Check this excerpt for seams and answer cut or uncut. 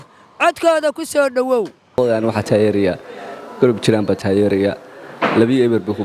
cut